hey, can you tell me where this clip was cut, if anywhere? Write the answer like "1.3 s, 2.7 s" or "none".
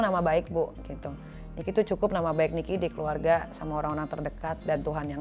none